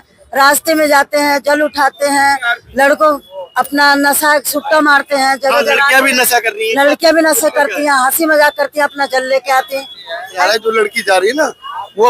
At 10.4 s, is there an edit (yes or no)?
yes